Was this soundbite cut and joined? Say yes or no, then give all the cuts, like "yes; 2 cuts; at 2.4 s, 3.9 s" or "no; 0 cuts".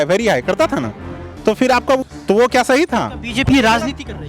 yes; 1 cut; at 2.0 s